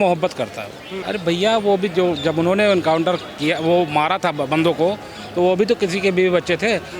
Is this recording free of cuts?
no; 2 cuts; at 1.0 s, 4.4 s

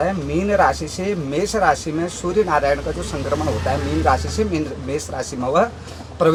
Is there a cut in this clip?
no; 0 cuts

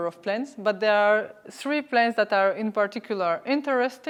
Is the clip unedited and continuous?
yes; 0 cuts

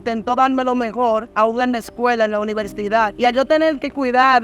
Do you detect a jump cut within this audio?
yes; 2 cuts; at 1.3 s, 3.1 s

